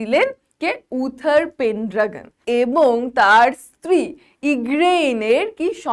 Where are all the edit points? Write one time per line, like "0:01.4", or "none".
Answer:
0:02.4

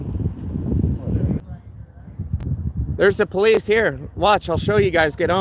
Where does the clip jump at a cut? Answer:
0:01.4

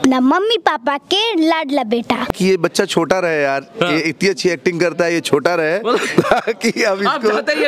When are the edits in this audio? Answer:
0:02.3

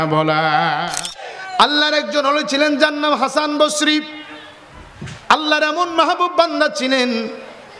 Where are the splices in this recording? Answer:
0:01.1

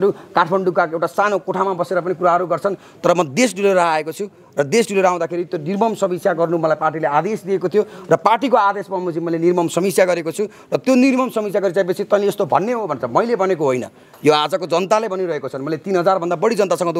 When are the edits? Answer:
none

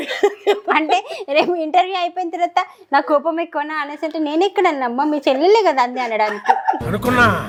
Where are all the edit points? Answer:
none

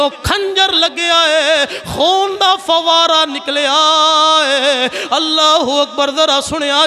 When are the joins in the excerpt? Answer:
none

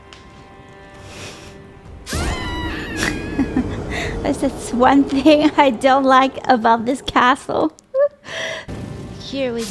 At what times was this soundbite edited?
0:08.7

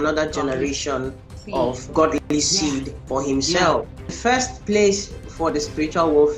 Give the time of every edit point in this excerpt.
0:01.9
0:04.0

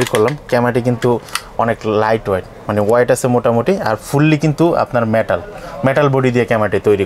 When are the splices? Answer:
none

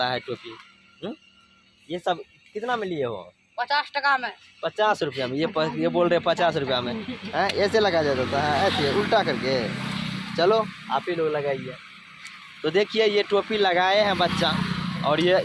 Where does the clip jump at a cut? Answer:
none

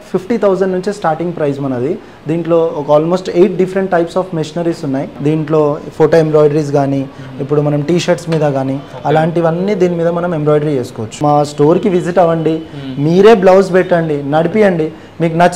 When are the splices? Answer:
0:05.1
0:11.2

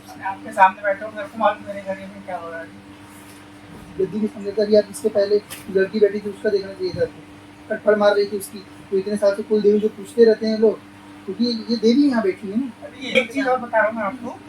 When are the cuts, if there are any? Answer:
0:13.1

